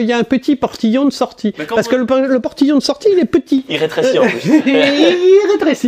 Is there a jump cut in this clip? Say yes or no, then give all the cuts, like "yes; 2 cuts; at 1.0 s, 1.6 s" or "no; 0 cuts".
no; 0 cuts